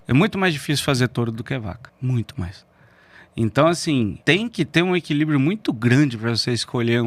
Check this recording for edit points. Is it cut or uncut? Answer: cut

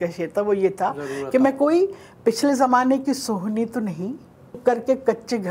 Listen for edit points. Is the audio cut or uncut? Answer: cut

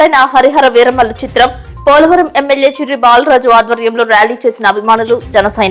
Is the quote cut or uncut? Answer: uncut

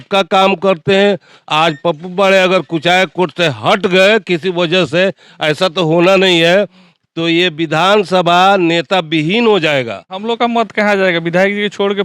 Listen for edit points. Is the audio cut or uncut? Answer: cut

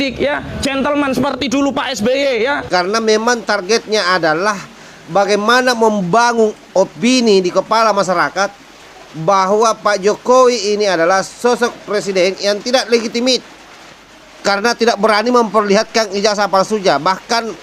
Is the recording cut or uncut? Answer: cut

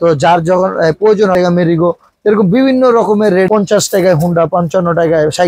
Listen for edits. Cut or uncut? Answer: cut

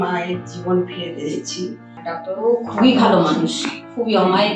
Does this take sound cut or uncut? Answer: cut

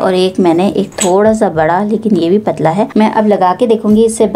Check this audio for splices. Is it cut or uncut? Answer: uncut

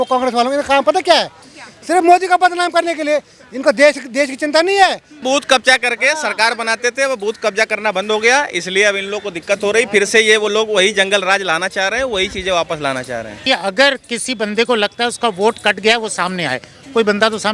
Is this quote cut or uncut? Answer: cut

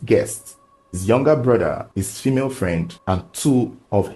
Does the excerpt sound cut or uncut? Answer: cut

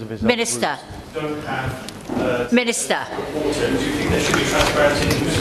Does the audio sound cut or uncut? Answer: uncut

